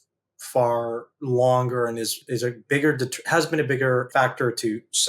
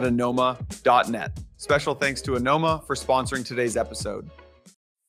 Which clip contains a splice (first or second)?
first